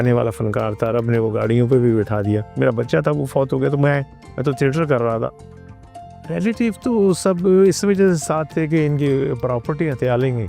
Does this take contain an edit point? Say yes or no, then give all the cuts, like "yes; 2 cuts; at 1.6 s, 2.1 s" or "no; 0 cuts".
yes; 2 cuts; at 2.5 s, 5.6 s